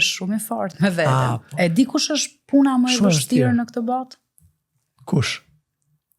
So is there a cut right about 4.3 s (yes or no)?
no